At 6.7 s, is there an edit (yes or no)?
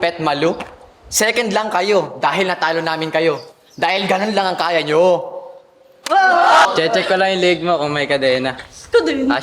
yes